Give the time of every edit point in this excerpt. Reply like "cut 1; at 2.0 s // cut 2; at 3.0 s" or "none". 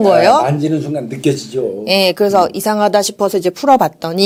none